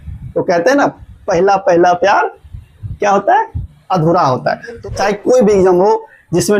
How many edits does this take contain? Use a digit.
1